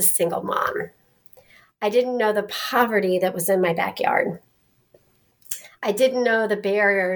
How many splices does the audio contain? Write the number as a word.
zero